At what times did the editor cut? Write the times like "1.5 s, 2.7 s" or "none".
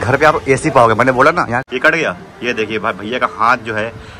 1.7 s